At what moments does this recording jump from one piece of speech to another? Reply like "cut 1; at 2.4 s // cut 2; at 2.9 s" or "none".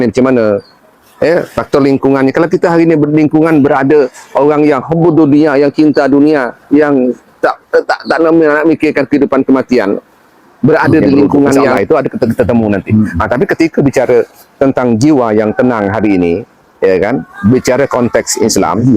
cut 1; at 11.7 s